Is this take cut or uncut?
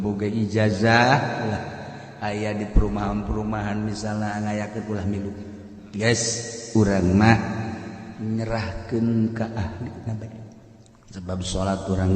uncut